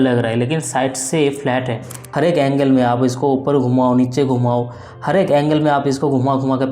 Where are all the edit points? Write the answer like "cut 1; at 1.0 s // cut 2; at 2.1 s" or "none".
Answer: cut 1; at 2.0 s